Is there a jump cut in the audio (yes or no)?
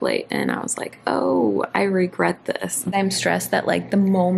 yes